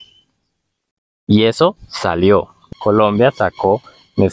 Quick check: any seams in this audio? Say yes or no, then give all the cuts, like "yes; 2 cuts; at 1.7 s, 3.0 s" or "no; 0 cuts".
yes; 1 cut; at 2.6 s